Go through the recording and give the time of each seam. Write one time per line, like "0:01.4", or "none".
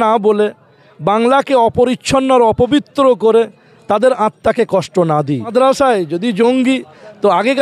0:05.5